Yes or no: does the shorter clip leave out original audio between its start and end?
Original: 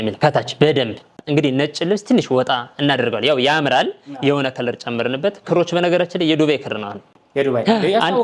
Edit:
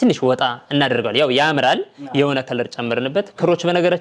no